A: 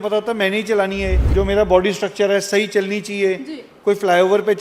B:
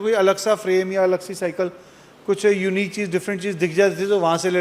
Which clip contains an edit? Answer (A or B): A